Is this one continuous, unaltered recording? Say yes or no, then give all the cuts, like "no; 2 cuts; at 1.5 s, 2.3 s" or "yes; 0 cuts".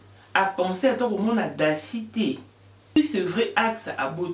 no; 1 cut; at 3.0 s